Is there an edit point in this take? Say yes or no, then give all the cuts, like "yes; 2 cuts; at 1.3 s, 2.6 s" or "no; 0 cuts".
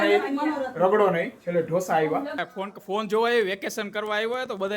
yes; 1 cut; at 2.4 s